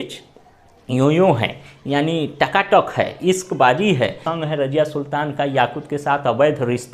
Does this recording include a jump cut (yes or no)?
yes